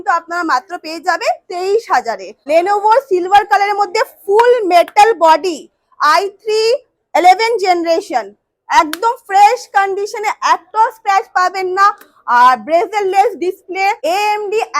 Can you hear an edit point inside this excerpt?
yes; 2 cuts; at 2.3 s, 14.0 s

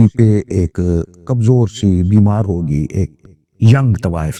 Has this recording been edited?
no; 0 cuts

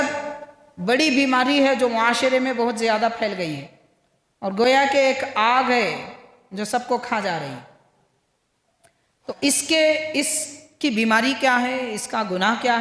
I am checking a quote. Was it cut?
no; 0 cuts

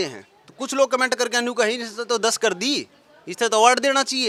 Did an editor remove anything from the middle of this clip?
no; 0 cuts

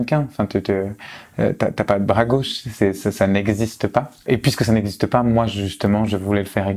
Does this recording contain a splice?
no; 0 cuts

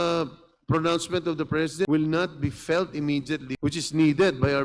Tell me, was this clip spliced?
yes; 2 cuts; at 1.9 s, 3.5 s

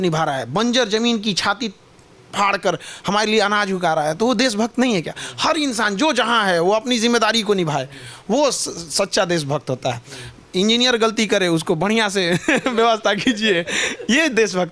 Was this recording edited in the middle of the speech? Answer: no; 0 cuts

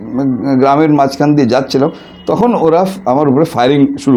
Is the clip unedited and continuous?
yes; 0 cuts

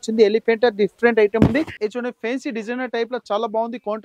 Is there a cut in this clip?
yes; 1 cut; at 1.8 s

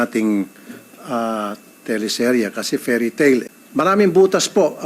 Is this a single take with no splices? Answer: no; 1 cut; at 3.6 s

